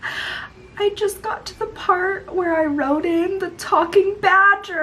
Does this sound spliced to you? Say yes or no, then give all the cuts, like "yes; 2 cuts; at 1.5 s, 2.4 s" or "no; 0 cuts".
no; 0 cuts